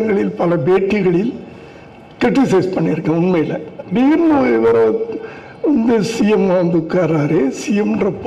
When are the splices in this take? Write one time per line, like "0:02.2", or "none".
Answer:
0:03.9